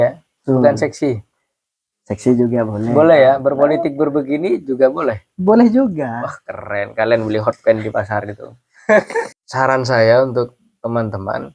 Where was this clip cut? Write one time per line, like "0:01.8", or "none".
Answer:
0:09.4